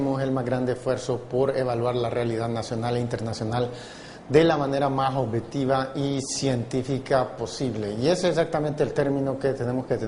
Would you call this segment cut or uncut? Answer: uncut